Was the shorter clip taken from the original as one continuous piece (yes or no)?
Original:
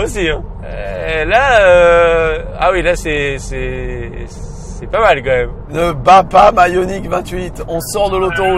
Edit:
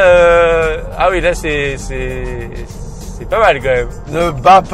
yes